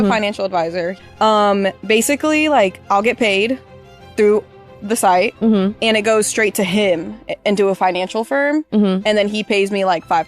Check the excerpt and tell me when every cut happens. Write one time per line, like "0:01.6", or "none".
0:01.0